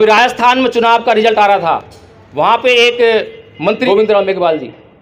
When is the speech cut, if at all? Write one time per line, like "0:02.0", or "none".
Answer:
0:03.8